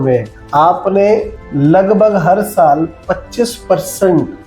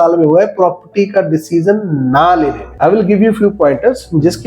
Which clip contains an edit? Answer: second; 1 cut; at 2.6 s

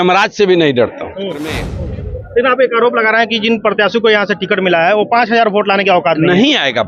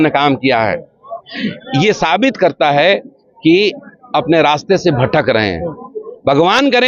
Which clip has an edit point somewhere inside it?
first; 1 cut; at 1.7 s

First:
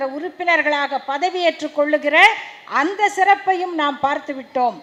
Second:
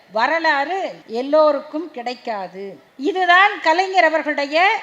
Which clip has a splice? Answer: second; 2 cuts; at 1.0 s, 2.8 s

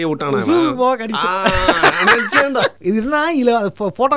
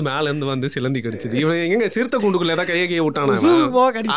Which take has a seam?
first; 1 cut; at 2.8 s

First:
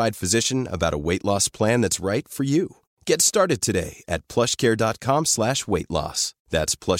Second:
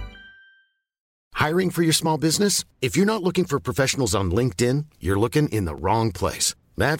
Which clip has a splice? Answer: second; 1 cut; at 1.0 s

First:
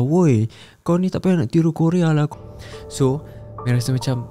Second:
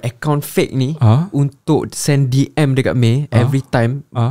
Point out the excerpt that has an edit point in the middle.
first; 1 cut; at 2.3 s

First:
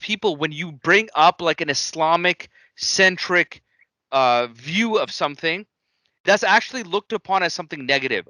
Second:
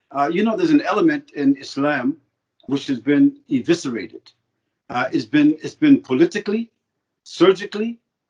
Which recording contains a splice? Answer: second; 1 cut; at 2.6 s

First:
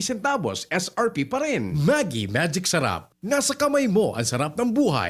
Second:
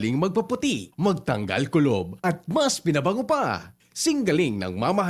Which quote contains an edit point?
first; 1 cut; at 1.7 s

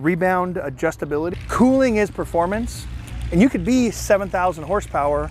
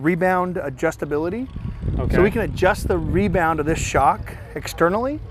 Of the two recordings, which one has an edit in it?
first; 1 cut; at 1.4 s

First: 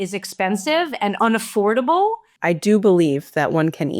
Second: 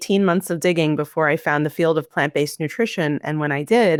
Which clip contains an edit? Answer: first; 1 cut; at 2.3 s

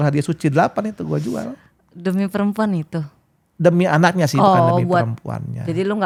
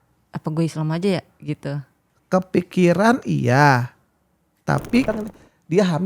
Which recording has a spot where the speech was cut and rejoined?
second; 1 cut; at 5.1 s

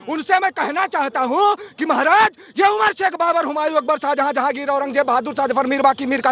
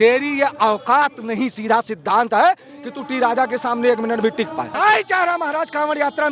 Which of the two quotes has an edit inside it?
second; 1 cut; at 4.7 s

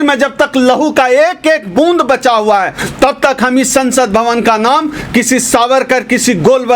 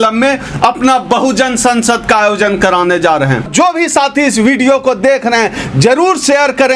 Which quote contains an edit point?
second; 1 cut; at 3.5 s

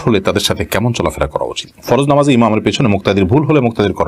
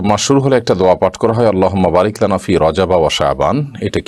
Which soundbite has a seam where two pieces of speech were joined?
first; 1 cut; at 1.6 s

